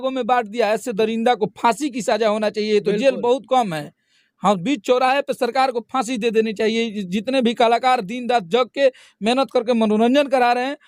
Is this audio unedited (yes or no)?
yes